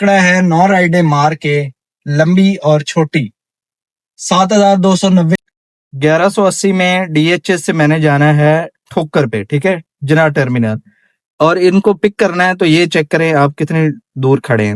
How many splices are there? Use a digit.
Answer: 1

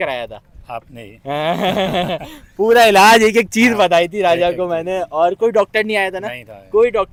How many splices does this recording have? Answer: 0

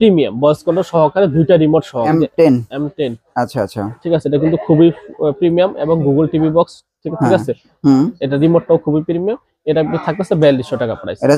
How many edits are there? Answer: 1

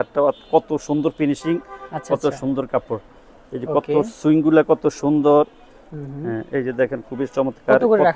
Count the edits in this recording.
0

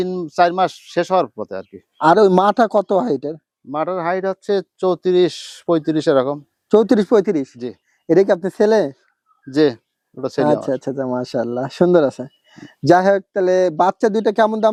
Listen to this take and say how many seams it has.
0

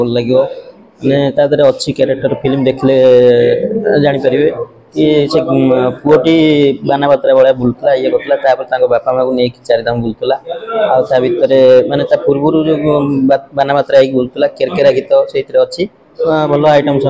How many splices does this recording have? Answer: 0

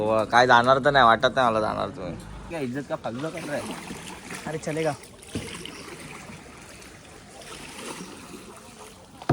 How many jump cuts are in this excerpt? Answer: 1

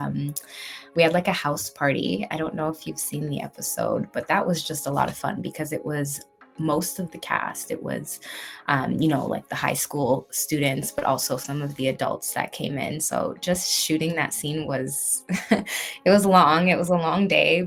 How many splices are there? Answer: 0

